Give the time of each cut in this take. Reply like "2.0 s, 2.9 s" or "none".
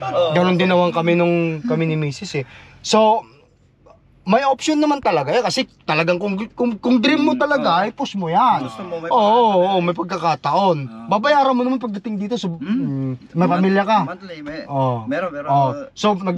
none